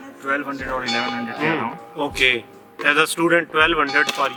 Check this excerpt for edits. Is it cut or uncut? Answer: uncut